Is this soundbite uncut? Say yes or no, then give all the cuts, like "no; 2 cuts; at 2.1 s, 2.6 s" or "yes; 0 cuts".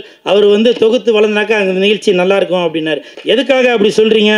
no; 1 cut; at 3.1 s